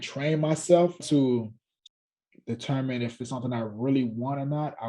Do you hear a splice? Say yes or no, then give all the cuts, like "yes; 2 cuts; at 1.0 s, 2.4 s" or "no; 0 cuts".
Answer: yes; 1 cut; at 1.0 s